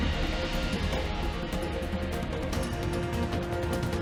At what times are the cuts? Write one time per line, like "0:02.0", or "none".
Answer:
none